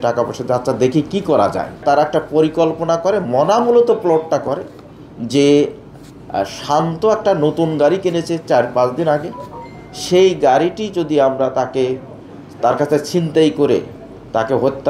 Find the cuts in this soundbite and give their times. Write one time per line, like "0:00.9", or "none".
0:01.8